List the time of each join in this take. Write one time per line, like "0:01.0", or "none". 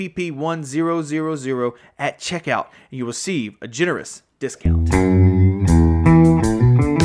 0:04.6